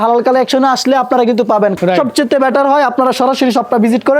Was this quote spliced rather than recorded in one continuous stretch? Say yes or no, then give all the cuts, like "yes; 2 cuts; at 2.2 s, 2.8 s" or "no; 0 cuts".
yes; 1 cut; at 1.7 s